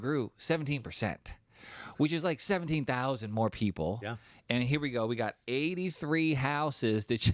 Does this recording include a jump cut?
no; 0 cuts

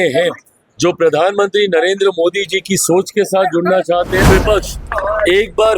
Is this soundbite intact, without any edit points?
no; 1 cut; at 4.3 s

